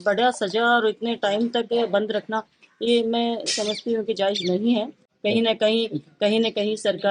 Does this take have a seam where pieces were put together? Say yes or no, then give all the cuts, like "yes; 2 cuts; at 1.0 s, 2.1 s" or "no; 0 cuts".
no; 0 cuts